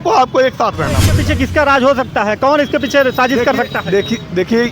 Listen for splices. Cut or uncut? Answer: cut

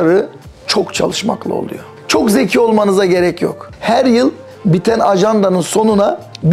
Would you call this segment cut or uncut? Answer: cut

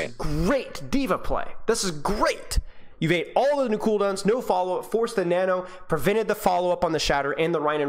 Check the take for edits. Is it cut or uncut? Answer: uncut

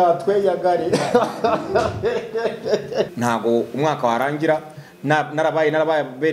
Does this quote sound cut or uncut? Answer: cut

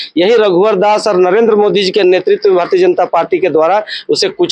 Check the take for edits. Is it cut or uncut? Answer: uncut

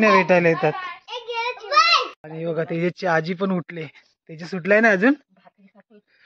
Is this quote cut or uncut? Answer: cut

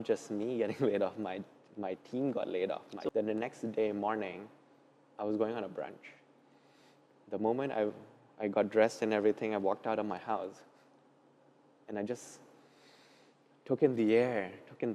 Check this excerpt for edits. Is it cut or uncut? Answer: cut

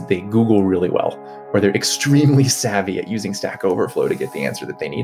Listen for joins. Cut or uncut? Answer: uncut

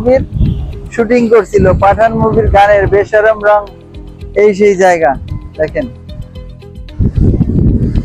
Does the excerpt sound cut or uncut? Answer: uncut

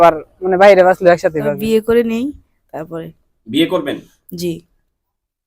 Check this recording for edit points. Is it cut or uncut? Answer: cut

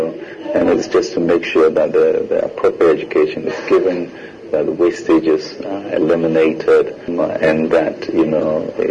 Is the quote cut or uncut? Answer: cut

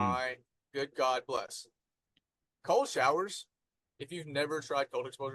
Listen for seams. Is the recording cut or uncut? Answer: uncut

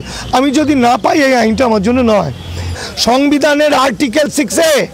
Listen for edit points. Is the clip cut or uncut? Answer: cut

